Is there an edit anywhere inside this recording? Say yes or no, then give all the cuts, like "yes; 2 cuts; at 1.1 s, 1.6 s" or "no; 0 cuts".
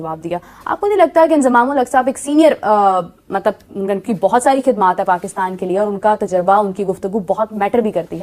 no; 0 cuts